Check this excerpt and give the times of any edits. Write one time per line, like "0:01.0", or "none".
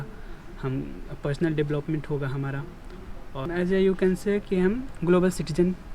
0:03.4

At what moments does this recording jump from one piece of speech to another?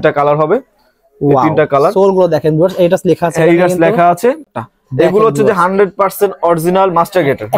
0:04.4

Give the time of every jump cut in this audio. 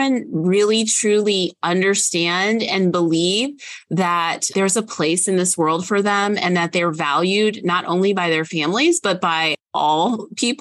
none

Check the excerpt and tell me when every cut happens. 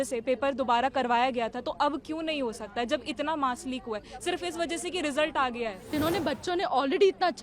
0:05.9

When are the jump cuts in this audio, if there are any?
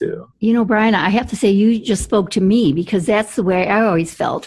none

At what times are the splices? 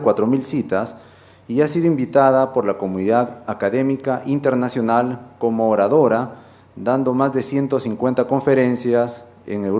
0:01.4

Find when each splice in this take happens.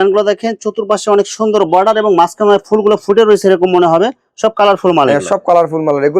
none

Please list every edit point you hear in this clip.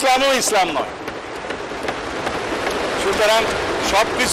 none

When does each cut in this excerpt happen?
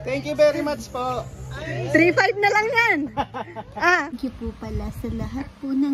0:04.2

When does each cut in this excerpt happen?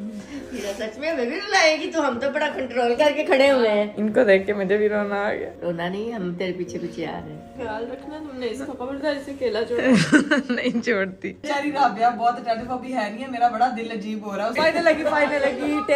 0:03.9
0:07.5
0:11.4
0:14.5

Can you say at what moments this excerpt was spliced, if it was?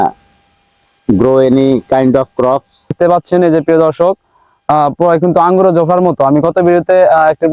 0:03.0

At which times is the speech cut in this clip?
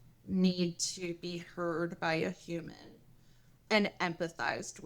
0:03.6

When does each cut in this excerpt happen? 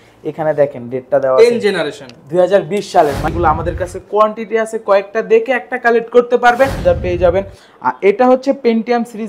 0:03.2
0:06.8

